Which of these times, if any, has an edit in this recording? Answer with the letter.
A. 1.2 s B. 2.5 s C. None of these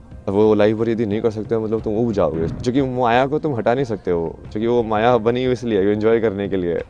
B